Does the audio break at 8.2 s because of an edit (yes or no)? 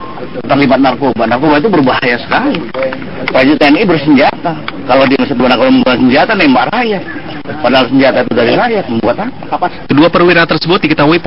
yes